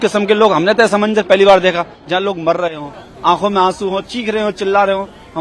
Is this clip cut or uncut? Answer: uncut